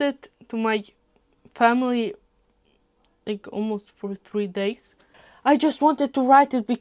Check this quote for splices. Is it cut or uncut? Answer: cut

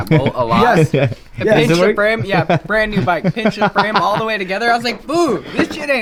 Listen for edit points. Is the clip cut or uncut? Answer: uncut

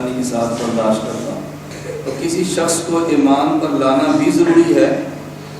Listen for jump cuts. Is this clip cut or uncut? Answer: cut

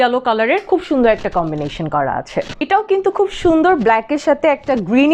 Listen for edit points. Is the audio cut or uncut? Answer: cut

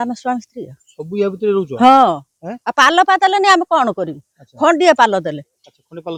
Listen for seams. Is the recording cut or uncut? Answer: uncut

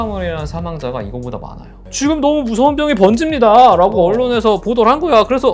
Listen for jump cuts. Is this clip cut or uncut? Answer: cut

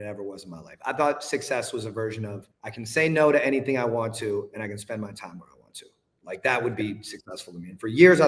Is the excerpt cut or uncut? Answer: uncut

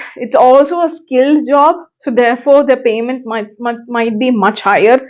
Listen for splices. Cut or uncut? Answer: uncut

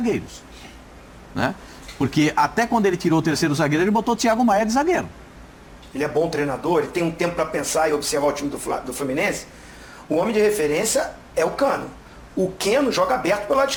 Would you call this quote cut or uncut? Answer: uncut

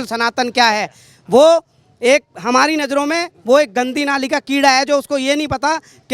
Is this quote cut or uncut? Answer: uncut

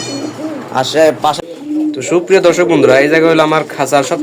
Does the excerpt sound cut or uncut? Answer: cut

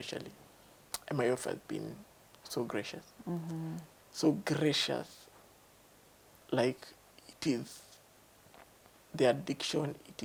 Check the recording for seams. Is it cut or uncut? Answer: uncut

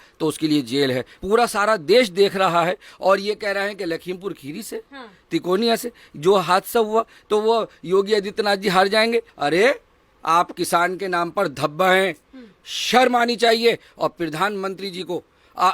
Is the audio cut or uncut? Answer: cut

